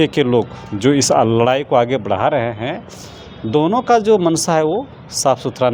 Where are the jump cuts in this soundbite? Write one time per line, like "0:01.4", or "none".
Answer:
none